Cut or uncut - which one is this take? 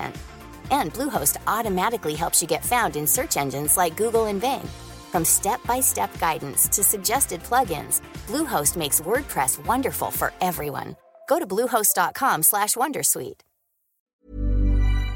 cut